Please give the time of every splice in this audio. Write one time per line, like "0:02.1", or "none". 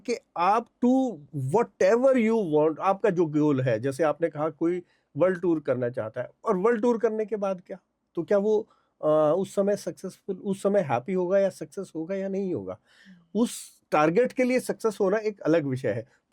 none